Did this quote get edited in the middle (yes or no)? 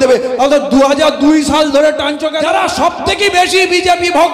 yes